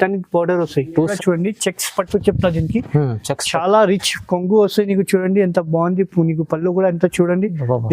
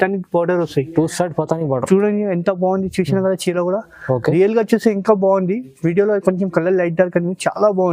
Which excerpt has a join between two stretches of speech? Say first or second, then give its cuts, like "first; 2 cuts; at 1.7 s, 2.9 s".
first; 1 cut; at 1.1 s